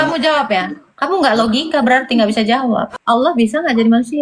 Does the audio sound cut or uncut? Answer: cut